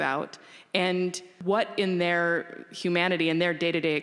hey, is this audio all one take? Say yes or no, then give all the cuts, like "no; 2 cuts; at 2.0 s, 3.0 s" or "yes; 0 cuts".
no; 1 cut; at 1.3 s